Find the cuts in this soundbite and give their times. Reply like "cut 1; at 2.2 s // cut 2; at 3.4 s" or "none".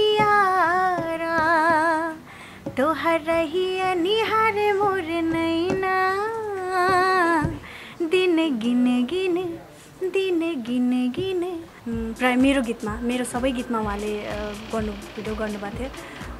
cut 1; at 11.7 s